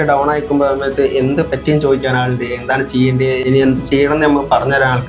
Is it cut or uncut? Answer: cut